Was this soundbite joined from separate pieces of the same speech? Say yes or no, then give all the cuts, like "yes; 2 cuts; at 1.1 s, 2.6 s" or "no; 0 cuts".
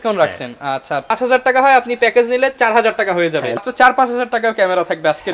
yes; 2 cuts; at 1.1 s, 3.6 s